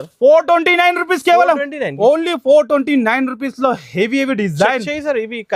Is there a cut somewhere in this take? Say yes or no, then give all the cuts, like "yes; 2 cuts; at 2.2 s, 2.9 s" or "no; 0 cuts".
no; 0 cuts